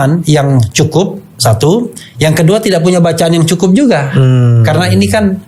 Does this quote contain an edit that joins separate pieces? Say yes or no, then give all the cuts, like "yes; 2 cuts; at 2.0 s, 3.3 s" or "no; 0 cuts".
no; 0 cuts